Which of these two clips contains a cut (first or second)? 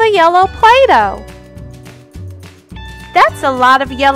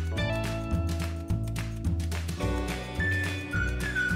first